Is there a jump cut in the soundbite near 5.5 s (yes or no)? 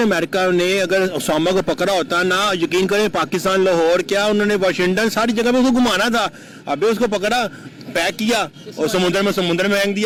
no